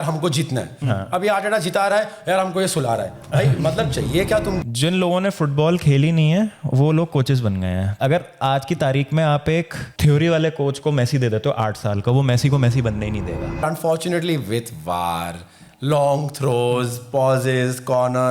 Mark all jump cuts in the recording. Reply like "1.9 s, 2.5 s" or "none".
4.6 s, 7.9 s, 13.6 s